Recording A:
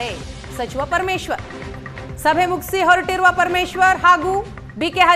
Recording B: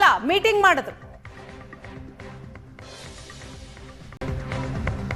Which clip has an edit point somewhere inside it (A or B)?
B